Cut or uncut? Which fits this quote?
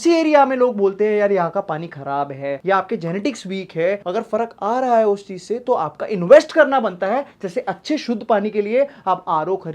uncut